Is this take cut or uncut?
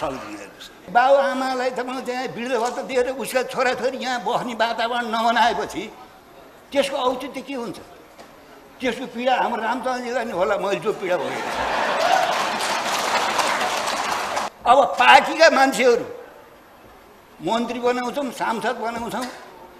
cut